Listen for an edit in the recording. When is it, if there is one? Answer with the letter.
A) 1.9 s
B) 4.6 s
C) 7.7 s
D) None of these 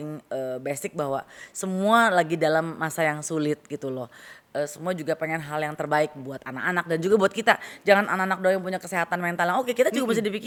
D